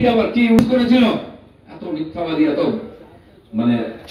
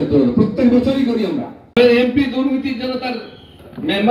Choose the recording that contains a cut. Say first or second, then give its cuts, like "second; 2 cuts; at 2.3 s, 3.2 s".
second; 1 cut; at 1.7 s